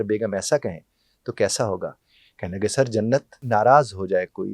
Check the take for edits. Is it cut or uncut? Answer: cut